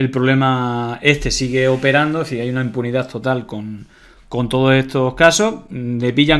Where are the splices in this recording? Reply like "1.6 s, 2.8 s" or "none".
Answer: none